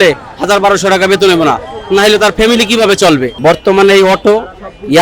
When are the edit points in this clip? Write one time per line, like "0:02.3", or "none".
0:03.3